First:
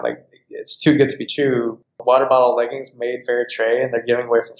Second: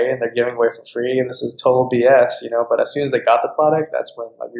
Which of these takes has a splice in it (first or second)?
first